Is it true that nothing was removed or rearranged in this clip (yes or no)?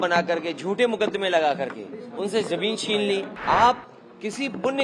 no